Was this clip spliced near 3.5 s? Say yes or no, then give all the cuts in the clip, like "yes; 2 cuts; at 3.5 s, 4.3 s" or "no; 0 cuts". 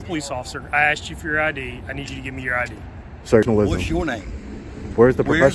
yes; 1 cut; at 3.5 s